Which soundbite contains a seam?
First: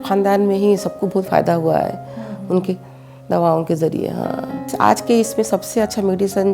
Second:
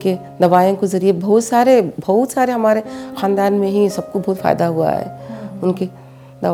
first; 1 cut; at 4.7 s

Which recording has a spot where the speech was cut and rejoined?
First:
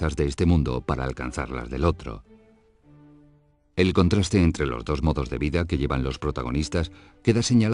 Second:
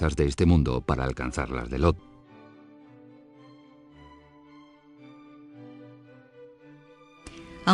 first; 1 cut; at 2.0 s

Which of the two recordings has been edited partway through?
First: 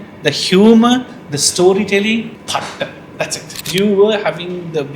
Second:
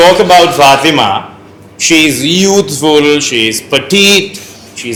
first; 2 cuts; at 2.4 s, 3.6 s

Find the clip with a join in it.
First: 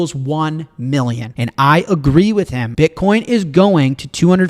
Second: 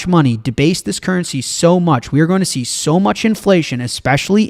first; 2 cuts; at 1.3 s, 2.6 s

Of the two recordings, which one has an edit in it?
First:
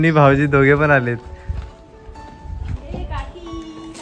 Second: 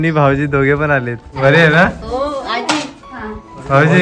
second; 1 cut; at 1.2 s

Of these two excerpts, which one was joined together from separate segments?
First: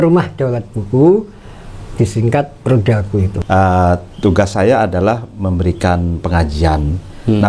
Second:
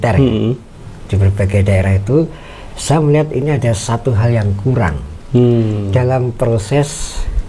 first; 1 cut; at 3.4 s

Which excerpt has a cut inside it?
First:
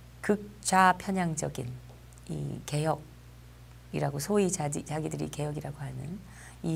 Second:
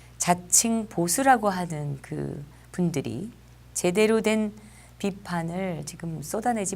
second; 1 cut; at 4.2 s

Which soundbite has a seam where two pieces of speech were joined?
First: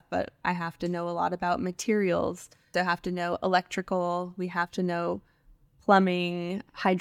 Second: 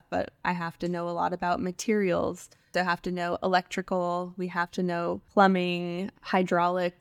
second; 1 cut; at 5.2 s

